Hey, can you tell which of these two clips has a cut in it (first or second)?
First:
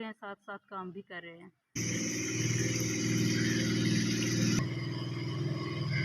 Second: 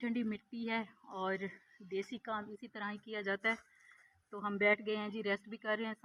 first